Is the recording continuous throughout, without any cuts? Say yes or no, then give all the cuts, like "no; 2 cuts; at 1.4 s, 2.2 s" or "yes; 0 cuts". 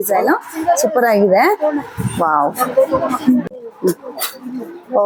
no; 1 cut; at 3.6 s